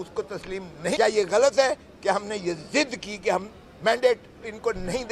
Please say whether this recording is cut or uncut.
cut